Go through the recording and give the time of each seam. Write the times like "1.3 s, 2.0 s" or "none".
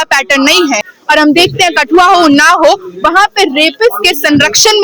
0.9 s